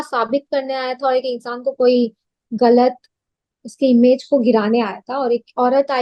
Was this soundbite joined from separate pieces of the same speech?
no; 0 cuts

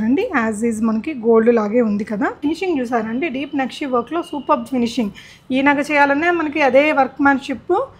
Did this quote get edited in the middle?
yes; 1 cut; at 2.4 s

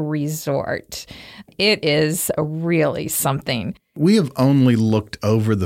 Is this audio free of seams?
no; 2 cuts; at 1.5 s, 4.0 s

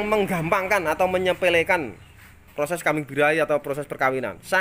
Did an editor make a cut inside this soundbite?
no; 0 cuts

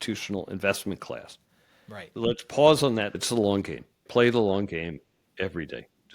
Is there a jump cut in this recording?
yes; 2 cuts; at 2.2 s, 3.2 s

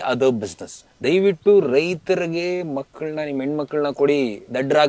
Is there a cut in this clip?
yes; 1 cut; at 1.1 s

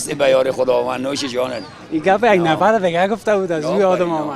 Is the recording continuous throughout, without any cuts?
yes; 0 cuts

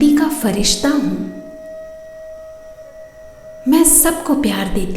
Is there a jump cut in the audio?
yes; 2 cuts; at 1.9 s, 3.6 s

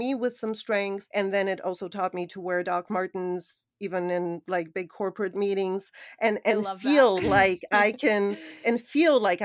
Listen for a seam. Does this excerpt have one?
yes; 1 cut; at 1.0 s

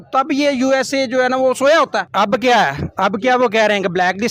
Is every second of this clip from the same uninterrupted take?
no; 1 cut; at 2.1 s

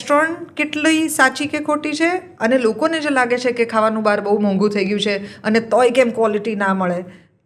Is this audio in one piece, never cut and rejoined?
yes; 0 cuts

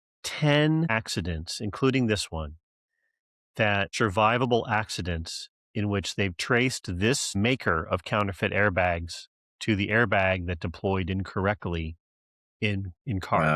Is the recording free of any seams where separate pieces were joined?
no; 2 cuts; at 0.9 s, 3.9 s

